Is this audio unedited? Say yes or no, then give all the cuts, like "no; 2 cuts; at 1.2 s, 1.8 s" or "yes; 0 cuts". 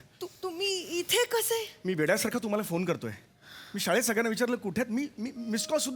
yes; 0 cuts